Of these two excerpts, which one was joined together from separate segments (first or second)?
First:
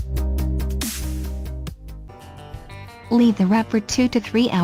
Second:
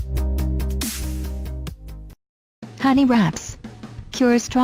second